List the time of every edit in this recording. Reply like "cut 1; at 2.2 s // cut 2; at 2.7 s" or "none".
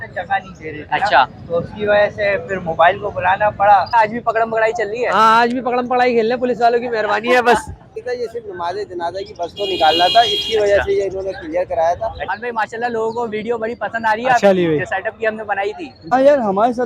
cut 1; at 3.9 s // cut 2; at 8.0 s // cut 3; at 12.3 s // cut 4; at 16.1 s